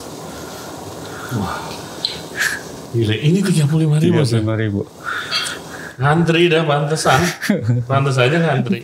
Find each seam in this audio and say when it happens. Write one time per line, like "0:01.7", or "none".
none